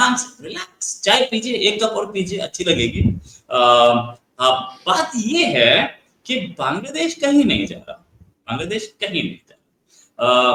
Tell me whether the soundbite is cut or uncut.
uncut